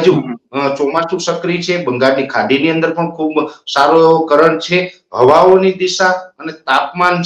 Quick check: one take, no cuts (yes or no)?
yes